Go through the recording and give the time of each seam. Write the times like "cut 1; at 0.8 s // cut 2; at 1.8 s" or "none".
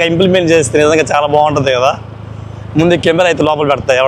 none